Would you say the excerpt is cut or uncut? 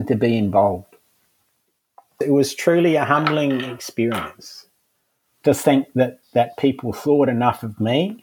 cut